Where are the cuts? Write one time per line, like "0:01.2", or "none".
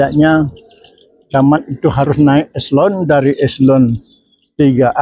none